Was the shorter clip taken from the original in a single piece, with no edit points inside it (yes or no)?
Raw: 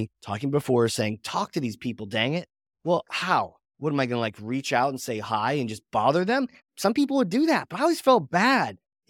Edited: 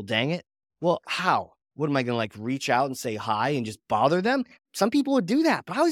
yes